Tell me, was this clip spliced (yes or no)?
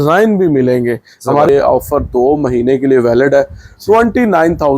yes